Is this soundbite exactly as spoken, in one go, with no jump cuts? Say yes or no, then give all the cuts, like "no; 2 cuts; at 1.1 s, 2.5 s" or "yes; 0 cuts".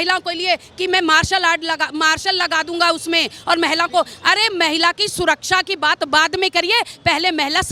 yes; 0 cuts